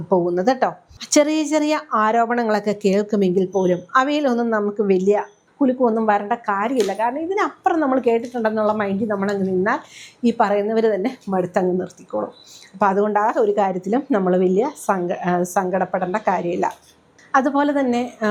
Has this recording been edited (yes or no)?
no